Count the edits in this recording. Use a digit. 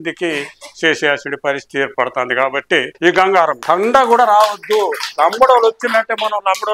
2